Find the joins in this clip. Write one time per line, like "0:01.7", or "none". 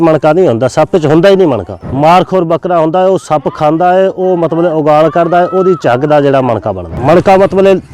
0:01.8
0:06.8